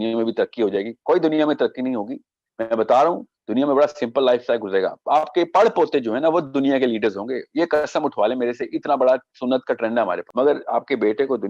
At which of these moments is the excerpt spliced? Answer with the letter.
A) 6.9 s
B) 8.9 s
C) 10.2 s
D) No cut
C